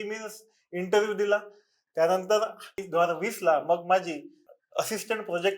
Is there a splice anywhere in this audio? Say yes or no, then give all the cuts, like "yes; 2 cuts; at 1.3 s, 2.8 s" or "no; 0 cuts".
yes; 2 cuts; at 2.8 s, 4.4 s